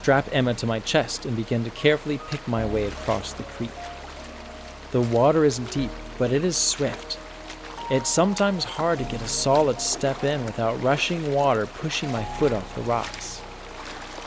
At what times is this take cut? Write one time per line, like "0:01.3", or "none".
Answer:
0:13.1